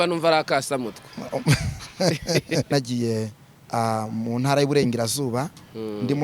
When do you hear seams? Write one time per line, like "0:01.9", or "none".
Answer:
0:02.7